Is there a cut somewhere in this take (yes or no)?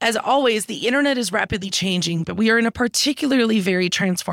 no